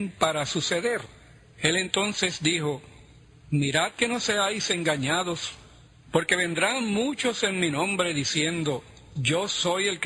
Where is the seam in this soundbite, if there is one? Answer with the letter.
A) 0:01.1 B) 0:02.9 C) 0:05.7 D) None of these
D